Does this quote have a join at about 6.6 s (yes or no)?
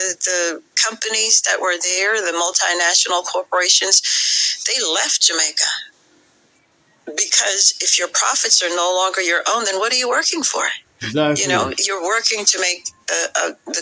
yes